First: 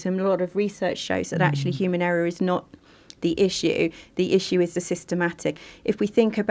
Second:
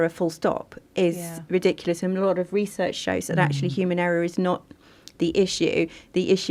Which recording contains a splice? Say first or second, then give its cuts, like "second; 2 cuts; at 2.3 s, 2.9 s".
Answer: first; 1 cut; at 5.6 s